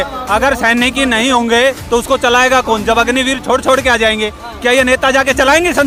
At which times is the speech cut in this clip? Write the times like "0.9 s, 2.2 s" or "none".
none